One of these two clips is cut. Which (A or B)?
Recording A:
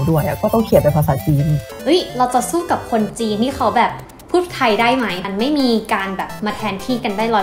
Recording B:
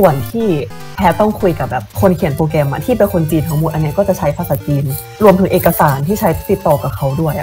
A